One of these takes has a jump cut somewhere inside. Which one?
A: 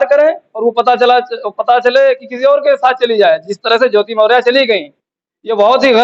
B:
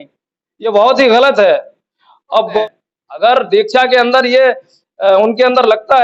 B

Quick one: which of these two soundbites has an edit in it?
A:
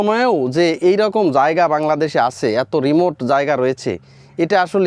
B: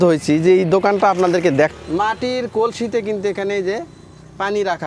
B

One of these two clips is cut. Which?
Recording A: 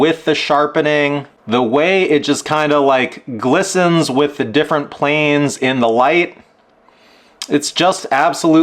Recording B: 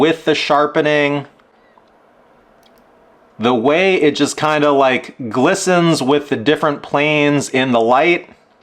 A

